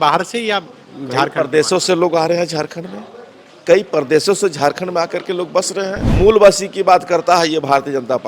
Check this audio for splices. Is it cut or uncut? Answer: cut